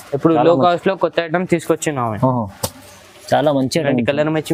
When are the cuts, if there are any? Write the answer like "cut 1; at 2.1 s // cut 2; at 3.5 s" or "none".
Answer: none